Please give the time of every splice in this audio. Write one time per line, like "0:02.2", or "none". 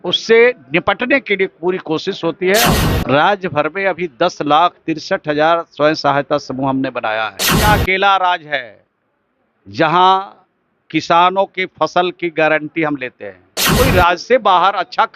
0:02.8
0:07.5
0:13.7